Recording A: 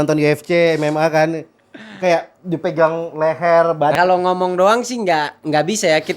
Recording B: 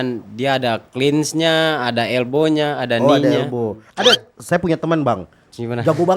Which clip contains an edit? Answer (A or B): A